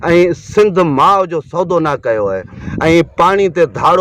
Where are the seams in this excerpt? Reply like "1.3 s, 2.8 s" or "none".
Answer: 2.6 s